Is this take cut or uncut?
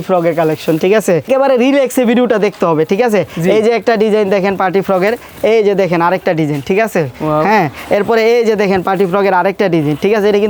uncut